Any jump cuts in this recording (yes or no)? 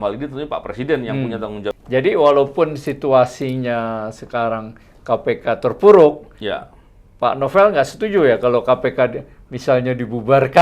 yes